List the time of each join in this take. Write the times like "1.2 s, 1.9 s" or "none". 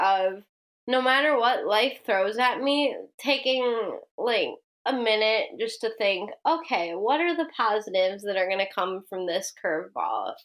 4.7 s